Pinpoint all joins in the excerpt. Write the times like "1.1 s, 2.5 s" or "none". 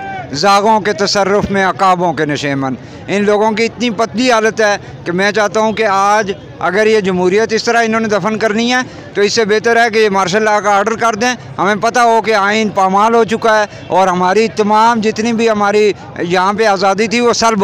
none